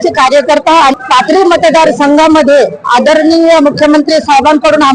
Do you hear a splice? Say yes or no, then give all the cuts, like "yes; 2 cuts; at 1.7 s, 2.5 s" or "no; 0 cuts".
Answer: yes; 1 cut; at 0.9 s